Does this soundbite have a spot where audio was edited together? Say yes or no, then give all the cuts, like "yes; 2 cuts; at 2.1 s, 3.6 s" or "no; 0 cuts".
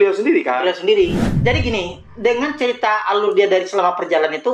yes; 1 cut; at 1.3 s